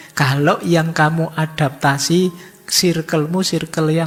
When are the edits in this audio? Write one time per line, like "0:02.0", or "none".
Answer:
none